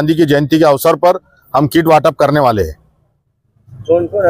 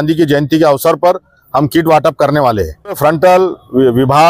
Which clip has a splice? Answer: second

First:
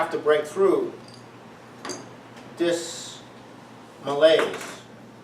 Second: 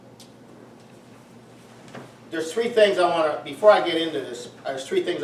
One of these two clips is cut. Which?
first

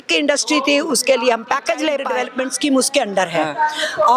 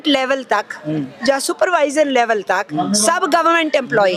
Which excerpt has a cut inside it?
first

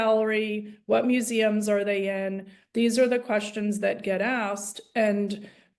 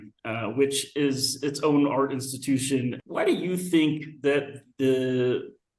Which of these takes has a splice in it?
second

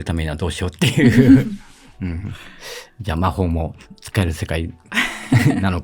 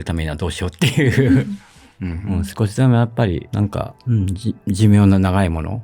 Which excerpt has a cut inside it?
second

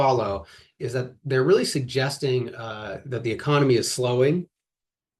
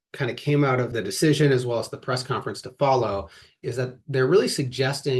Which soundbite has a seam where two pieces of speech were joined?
second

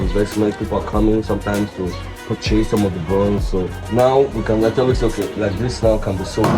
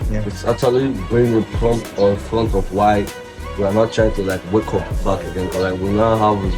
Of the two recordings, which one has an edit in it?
first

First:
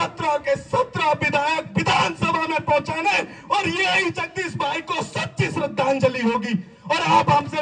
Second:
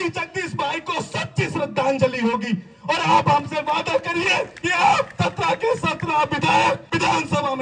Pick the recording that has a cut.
second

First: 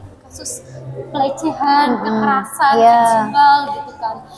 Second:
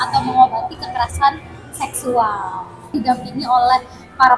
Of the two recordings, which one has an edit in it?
second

